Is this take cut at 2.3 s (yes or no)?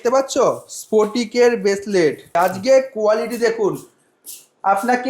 yes